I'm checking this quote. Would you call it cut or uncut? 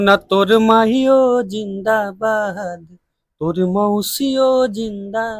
uncut